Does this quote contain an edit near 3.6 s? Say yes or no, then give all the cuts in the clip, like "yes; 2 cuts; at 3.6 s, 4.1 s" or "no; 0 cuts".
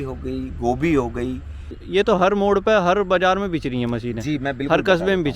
no; 1 cut; at 1.9 s